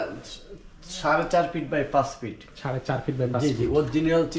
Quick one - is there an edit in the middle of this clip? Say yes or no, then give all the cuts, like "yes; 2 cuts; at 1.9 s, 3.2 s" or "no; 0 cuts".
no; 0 cuts